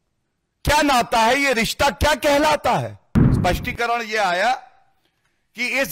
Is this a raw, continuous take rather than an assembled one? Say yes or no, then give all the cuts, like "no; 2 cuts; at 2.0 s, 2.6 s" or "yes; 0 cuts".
no; 1 cut; at 3.3 s